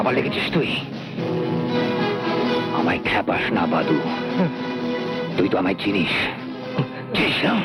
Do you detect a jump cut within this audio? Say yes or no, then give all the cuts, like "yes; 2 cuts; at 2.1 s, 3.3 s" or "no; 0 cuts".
no; 0 cuts